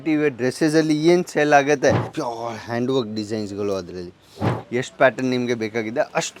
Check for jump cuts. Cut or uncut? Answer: cut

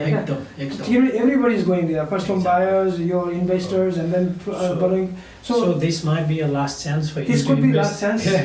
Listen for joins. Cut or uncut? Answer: uncut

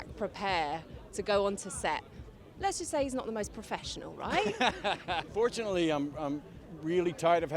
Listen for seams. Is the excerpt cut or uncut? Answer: cut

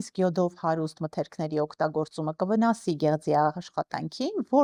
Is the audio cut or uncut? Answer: uncut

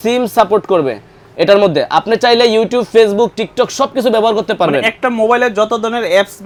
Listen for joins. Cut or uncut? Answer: uncut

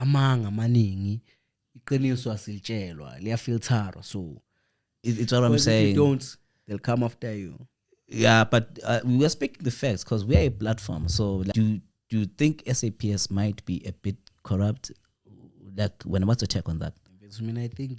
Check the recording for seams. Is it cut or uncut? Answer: cut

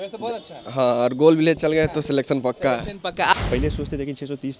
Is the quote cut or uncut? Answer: cut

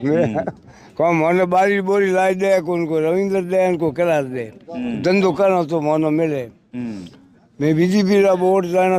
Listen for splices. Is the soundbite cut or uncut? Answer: uncut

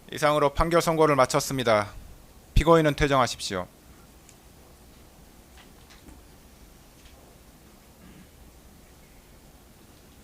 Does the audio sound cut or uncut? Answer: cut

